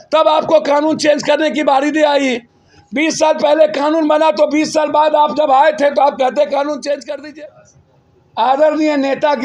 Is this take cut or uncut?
cut